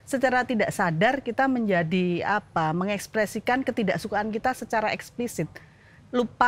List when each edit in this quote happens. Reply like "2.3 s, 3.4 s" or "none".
none